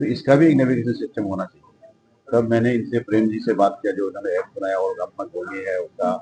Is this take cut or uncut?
uncut